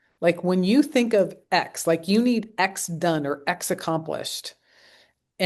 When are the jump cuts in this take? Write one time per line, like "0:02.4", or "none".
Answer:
none